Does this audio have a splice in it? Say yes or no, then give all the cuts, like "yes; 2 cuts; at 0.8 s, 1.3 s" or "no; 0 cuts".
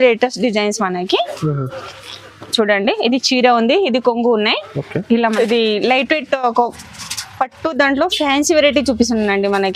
yes; 1 cut; at 5.2 s